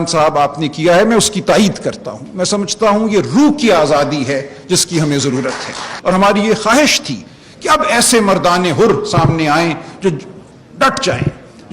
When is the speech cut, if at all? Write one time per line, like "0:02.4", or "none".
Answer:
0:05.9